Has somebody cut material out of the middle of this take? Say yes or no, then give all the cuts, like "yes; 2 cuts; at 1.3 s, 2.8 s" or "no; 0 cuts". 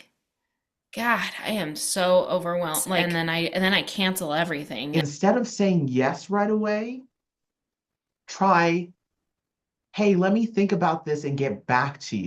yes; 2 cuts; at 3.0 s, 4.8 s